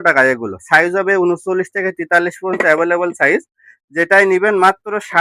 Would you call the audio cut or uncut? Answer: uncut